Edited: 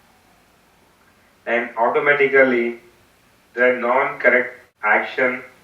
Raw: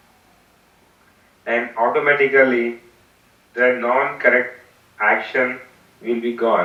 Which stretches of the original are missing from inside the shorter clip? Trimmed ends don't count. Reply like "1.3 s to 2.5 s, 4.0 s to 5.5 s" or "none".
4.6 s to 4.8 s